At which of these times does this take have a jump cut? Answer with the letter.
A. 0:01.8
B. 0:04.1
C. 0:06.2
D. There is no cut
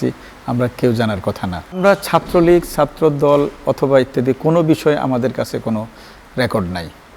A